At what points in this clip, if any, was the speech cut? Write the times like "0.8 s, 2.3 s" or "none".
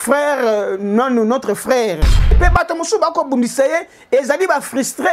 2.3 s